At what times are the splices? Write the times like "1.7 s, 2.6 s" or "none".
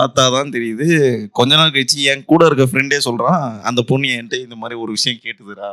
none

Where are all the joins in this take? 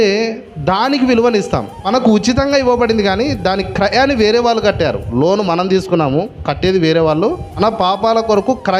2.2 s, 7.6 s

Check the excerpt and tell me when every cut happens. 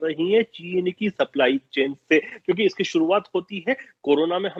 none

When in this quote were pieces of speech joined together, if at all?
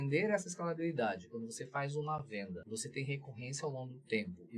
2.6 s

